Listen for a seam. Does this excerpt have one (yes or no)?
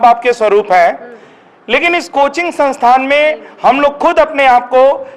no